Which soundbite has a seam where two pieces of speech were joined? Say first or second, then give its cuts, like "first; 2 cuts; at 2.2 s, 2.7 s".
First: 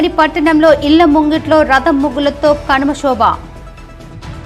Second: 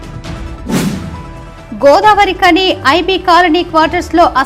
second; 1 cut; at 1.2 s